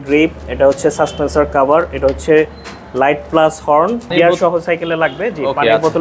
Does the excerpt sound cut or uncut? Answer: cut